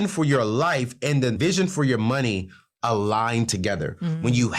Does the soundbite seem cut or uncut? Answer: cut